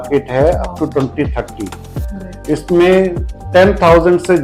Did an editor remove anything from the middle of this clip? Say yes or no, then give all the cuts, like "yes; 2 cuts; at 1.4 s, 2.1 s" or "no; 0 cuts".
no; 0 cuts